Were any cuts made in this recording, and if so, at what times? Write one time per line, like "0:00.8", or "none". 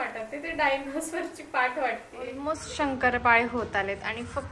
0:02.4